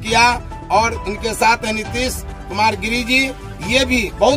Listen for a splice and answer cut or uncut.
uncut